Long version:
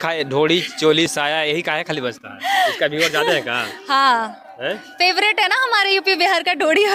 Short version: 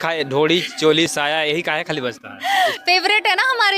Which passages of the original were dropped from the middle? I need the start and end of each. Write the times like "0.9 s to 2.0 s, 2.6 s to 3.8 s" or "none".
2.7 s to 4.9 s